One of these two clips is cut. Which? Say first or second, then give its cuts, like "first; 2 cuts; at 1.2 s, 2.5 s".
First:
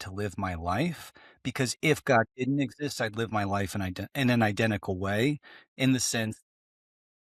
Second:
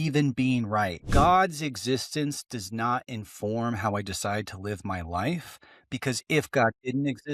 second; 1 cut; at 1.1 s